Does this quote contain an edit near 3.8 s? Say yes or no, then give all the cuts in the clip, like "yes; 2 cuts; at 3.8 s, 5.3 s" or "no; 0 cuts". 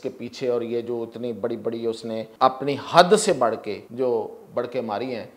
yes; 2 cuts; at 2.3 s, 3.8 s